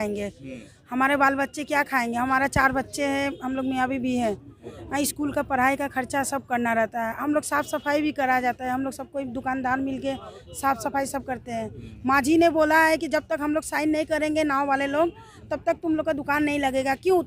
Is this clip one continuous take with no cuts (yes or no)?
yes